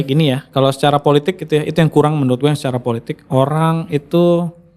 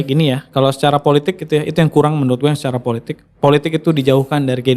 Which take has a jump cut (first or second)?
second